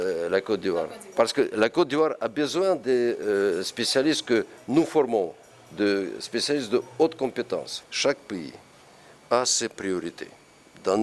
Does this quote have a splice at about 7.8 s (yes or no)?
yes